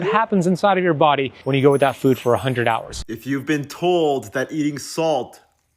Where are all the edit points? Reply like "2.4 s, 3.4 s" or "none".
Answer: 3.0 s